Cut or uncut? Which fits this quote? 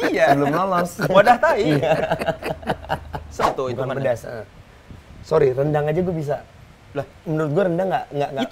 cut